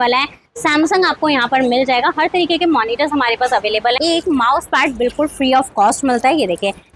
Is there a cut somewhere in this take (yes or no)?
yes